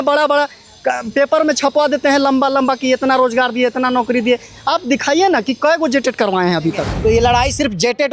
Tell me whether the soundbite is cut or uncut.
cut